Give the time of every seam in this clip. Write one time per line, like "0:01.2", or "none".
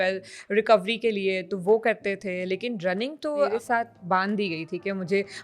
0:03.5